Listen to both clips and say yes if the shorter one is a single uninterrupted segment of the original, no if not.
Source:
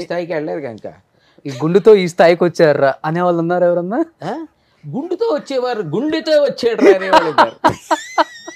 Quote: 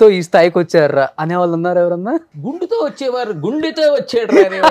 no